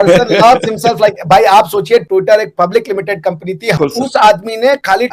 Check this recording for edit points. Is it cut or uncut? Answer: cut